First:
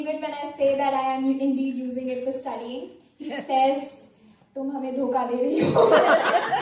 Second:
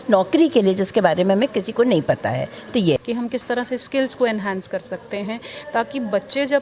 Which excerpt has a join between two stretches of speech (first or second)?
second